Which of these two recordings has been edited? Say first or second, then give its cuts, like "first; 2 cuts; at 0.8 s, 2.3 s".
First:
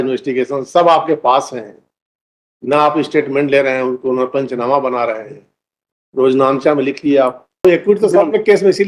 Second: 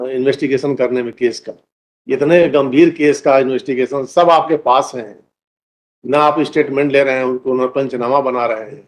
first; 1 cut; at 7.6 s